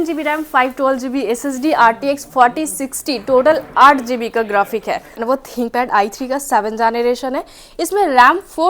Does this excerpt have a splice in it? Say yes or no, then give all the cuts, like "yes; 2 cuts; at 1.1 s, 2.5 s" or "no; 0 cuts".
yes; 1 cut; at 5.2 s